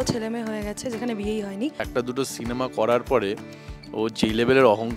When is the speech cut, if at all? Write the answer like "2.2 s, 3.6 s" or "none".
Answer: 1.8 s